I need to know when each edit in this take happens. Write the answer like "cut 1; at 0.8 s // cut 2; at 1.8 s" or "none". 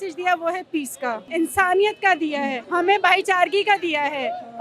cut 1; at 1.2 s // cut 2; at 2.6 s

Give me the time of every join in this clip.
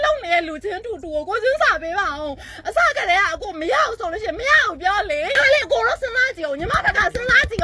cut 1; at 5.4 s

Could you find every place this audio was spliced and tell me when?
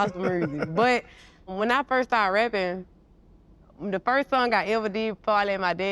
cut 1; at 1.5 s

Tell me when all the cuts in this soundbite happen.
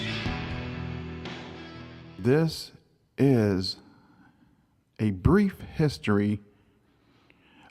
cut 1; at 2.3 s

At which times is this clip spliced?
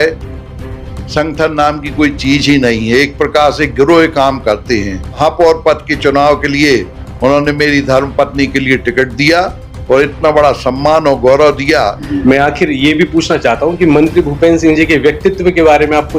cut 1; at 5.2 s // cut 2; at 12.1 s

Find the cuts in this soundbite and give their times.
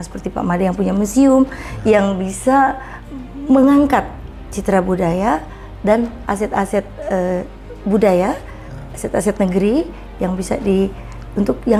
none

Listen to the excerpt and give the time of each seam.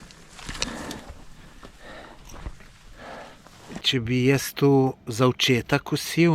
cut 1; at 3.8 s

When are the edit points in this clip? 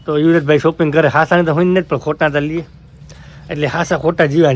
none

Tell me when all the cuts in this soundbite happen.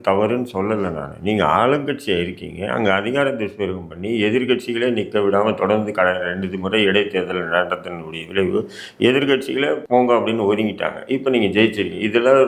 cut 1; at 9.8 s

